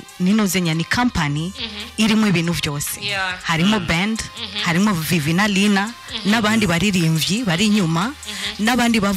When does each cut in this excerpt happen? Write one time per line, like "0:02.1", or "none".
none